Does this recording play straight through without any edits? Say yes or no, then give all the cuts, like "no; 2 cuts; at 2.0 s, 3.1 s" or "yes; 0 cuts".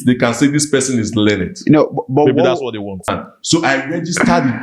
no; 1 cut; at 3.1 s